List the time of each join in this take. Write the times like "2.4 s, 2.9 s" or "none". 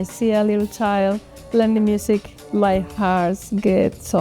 2.4 s

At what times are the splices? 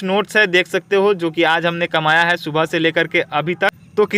none

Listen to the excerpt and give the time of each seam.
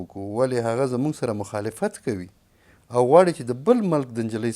none

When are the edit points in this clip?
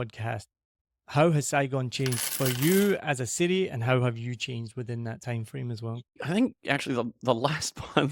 6.2 s

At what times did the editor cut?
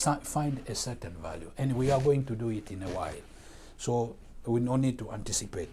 none

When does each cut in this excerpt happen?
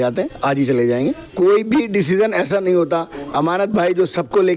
1.2 s

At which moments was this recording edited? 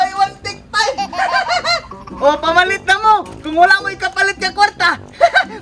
none

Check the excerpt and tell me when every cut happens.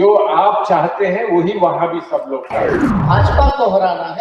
2.9 s

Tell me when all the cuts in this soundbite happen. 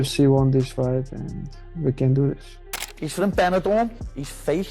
2.7 s

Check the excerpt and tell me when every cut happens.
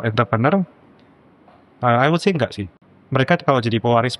2.7 s

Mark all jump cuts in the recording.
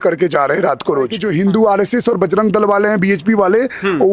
1.2 s

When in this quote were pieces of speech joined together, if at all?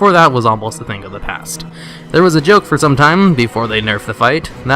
1.7 s

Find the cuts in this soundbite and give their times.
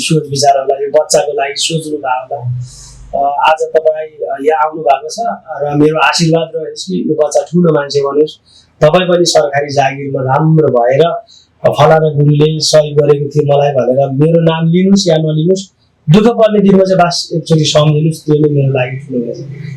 none

